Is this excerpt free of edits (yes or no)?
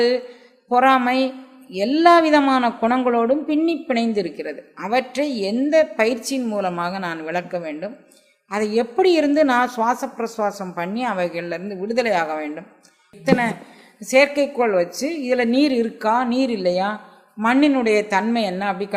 no